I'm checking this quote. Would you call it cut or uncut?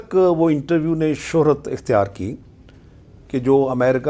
uncut